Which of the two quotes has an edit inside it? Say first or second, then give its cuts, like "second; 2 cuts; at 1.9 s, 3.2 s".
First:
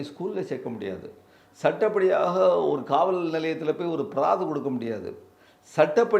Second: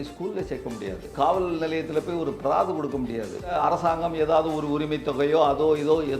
second; 2 cuts; at 1.1 s, 3.5 s